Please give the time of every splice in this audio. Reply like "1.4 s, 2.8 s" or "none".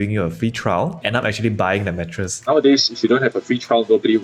1.0 s, 2.5 s